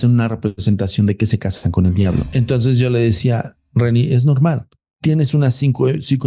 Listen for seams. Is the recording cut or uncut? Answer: cut